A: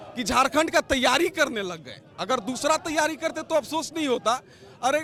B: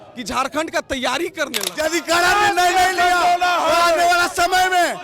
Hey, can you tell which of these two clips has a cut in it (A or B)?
B